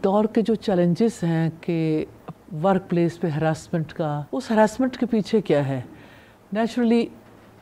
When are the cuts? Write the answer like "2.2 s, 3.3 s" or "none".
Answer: 4.2 s